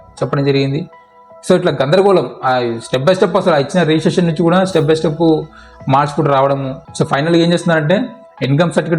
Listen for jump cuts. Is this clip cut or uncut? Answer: cut